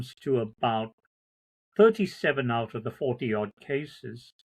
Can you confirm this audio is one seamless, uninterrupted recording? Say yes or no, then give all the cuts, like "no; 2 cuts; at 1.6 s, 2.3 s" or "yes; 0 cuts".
yes; 0 cuts